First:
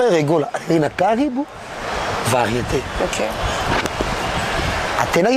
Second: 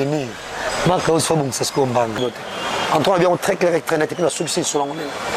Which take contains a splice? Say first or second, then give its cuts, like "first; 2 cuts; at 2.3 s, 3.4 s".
second; 1 cut; at 2.2 s